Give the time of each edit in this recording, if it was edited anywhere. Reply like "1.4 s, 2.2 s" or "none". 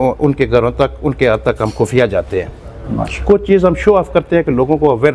none